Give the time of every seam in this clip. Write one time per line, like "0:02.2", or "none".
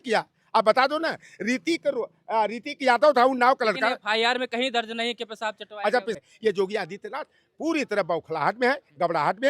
0:06.2